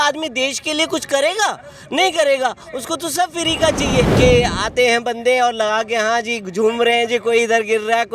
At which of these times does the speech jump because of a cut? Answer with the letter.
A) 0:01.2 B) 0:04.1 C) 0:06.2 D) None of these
B